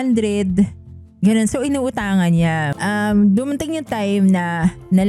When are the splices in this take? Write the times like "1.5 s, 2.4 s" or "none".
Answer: 2.7 s